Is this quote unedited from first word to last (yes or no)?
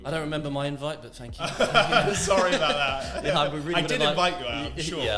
yes